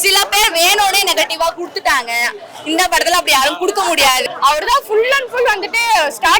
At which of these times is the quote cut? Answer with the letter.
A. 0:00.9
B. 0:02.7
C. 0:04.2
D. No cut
C